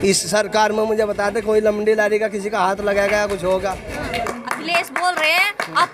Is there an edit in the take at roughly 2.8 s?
no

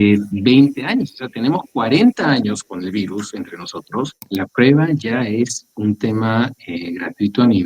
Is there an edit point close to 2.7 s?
no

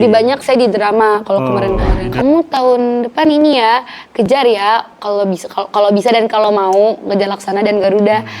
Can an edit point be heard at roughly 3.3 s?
no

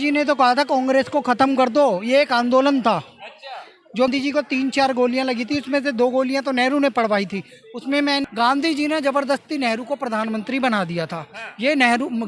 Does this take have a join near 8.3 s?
yes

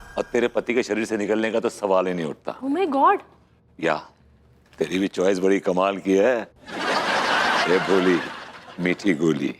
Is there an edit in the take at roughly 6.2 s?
no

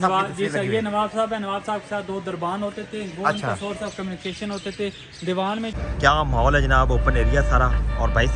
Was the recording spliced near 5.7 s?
yes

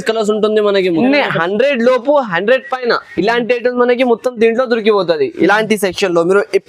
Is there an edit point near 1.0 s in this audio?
yes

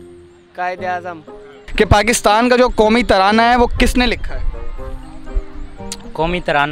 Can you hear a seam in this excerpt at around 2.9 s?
no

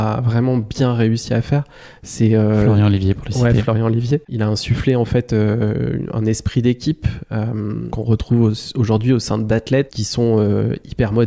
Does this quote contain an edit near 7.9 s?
yes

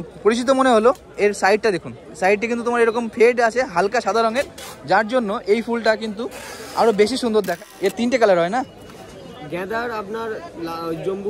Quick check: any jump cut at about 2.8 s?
no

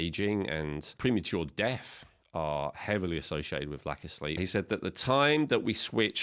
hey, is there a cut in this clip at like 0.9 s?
yes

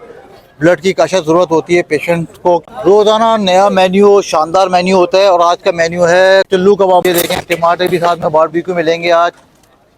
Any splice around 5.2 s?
no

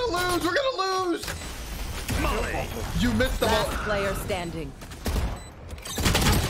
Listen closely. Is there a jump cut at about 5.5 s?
no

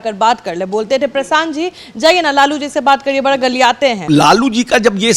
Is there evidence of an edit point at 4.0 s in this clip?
yes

